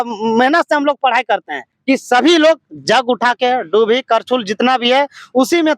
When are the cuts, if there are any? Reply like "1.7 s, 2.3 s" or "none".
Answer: 1.7 s

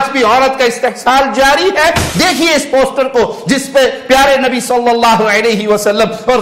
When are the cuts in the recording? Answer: 2.1 s

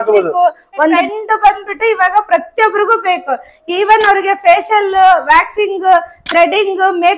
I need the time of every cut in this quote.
1.0 s

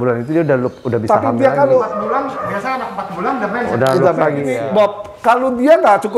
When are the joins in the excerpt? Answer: 4.6 s

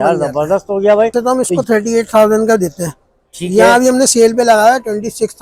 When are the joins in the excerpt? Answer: 1.1 s

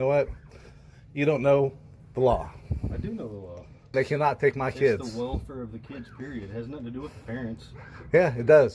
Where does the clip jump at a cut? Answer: 3.9 s

